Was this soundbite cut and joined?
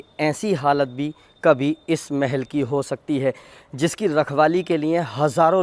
no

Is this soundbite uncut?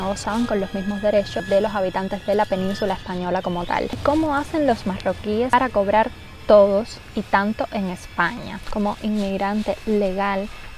no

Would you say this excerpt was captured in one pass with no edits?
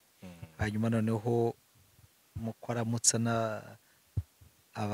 yes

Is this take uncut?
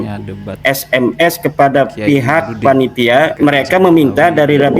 no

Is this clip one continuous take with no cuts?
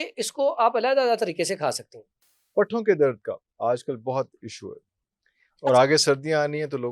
no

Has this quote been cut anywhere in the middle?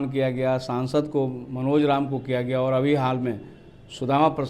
no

